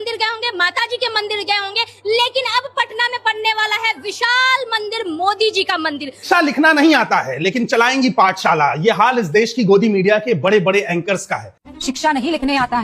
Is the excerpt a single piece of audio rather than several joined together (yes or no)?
no